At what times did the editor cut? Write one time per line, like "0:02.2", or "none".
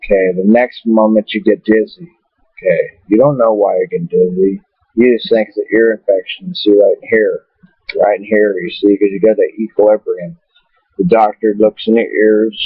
0:05.7

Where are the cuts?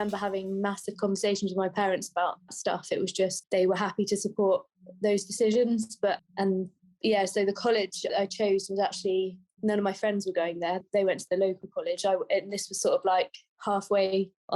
0:02.5
0:08.1
0:10.8

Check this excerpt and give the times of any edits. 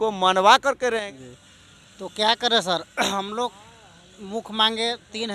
0:01.1

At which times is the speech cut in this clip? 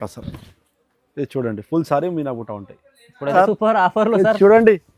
0:03.3

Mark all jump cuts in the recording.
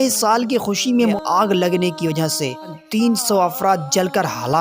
0:01.2
0:02.8

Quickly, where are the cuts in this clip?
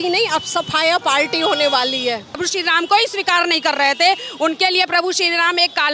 0:02.3

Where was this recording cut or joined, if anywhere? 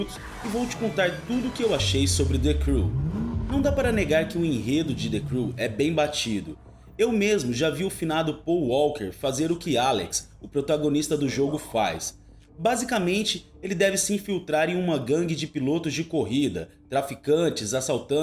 0:10.5

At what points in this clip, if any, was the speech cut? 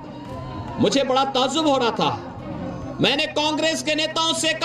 none

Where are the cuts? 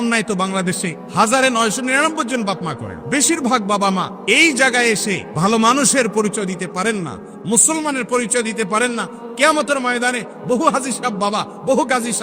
0:00.9
0:02.9
0:04.1
0:05.3

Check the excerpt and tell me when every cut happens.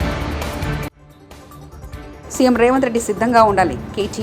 0:00.9

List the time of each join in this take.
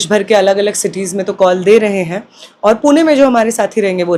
none

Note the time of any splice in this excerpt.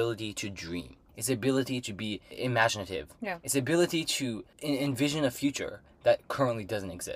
0:01.1
0:02.2
0:04.5

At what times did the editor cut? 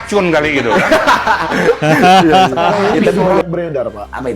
0:02.3

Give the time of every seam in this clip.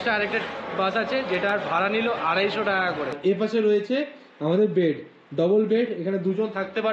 0:03.1

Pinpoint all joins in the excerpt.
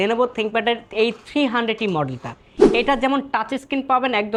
none

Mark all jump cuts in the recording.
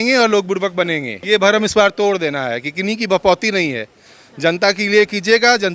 0:01.1

